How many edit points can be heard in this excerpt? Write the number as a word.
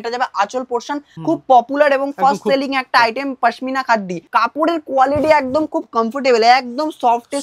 two